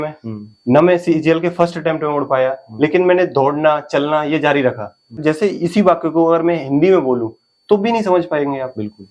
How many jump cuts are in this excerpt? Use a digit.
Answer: 1